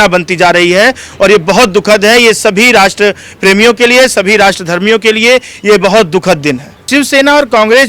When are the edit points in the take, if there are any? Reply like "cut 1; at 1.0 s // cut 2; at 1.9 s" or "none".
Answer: cut 1; at 6.9 s